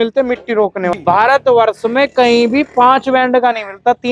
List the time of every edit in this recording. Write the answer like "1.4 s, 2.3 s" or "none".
0.9 s